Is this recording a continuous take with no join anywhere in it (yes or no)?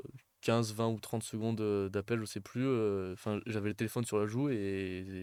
yes